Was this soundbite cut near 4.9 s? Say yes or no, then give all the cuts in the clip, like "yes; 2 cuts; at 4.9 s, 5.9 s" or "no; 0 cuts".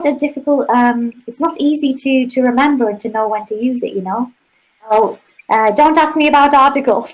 yes; 1 cut; at 4.9 s